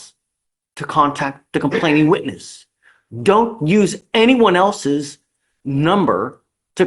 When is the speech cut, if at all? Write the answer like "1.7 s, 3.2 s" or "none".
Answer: none